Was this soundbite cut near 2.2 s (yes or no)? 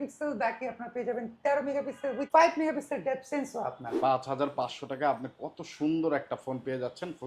yes